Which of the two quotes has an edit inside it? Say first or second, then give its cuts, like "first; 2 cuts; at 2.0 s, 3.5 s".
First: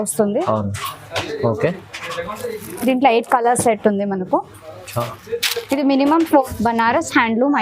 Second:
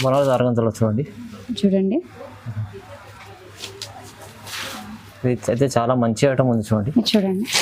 first; 1 cut; at 6.4 s